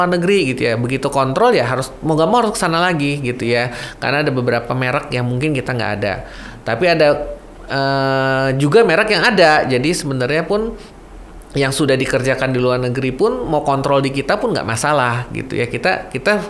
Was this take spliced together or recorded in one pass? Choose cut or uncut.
uncut